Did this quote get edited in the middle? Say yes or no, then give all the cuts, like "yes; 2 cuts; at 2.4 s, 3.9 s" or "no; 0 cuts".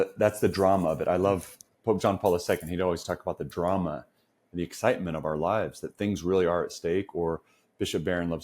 yes; 1 cut; at 1.6 s